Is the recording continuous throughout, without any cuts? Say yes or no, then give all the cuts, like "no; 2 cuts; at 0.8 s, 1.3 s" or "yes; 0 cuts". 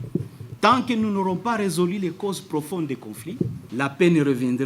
no; 1 cut; at 3.6 s